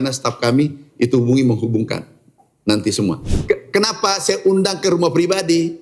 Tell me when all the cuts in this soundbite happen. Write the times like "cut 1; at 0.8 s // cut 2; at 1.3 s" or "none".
cut 1; at 3.3 s

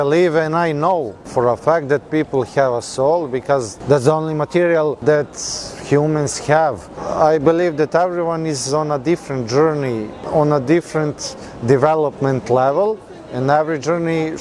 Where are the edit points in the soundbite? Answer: cut 1; at 1.2 s // cut 2; at 3.7 s // cut 3; at 5.0 s // cut 4; at 7.0 s // cut 5; at 10.2 s

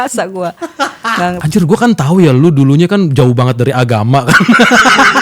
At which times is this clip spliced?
cut 1; at 1.4 s

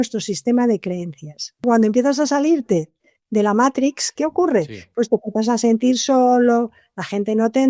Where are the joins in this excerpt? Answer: cut 1; at 1.6 s // cut 2; at 4.1 s

